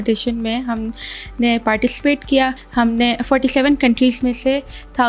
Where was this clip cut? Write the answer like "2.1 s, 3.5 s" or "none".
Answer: 2.6 s